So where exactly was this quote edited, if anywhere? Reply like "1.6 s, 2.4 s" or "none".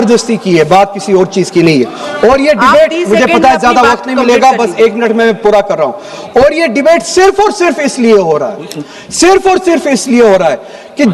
none